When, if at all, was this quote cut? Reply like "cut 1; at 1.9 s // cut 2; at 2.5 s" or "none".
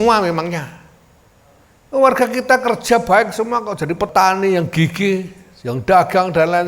cut 1; at 4.1 s